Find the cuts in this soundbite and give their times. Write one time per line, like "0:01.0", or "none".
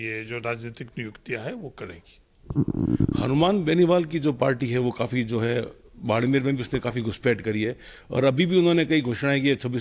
none